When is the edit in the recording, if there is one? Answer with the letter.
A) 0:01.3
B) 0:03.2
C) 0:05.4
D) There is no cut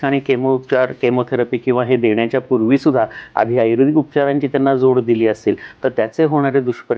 D